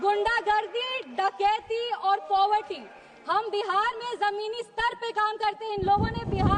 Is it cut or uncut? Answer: uncut